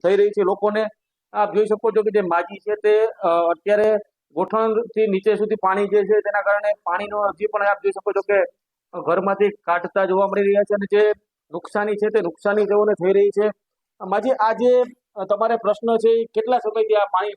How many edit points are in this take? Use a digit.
1